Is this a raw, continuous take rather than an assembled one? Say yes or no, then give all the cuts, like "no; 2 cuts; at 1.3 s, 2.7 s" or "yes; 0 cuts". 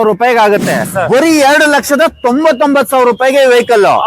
no; 1 cut; at 0.9 s